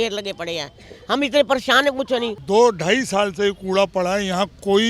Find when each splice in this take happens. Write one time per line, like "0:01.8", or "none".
0:02.4